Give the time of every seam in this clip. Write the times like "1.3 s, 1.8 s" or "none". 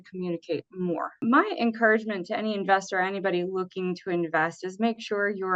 1.2 s